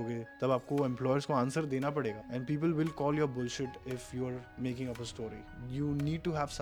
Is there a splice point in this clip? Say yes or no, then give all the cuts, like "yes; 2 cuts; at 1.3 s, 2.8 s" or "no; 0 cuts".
no; 0 cuts